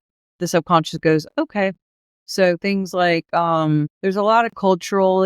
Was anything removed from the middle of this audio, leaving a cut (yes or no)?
yes